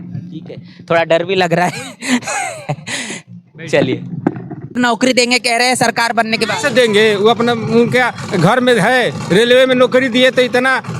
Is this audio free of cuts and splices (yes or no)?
no